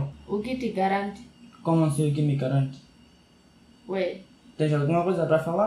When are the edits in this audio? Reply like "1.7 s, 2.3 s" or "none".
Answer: none